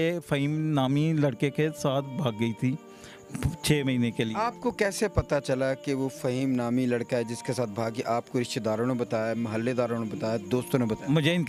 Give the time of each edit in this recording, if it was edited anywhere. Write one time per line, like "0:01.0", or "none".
none